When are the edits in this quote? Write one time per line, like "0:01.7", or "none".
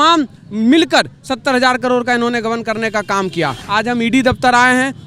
0:03.6